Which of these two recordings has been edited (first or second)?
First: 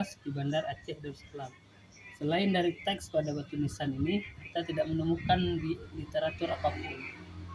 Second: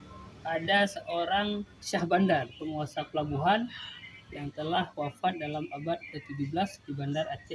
second